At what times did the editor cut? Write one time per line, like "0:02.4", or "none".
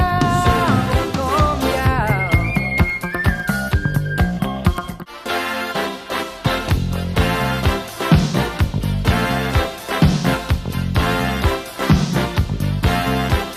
0:04.9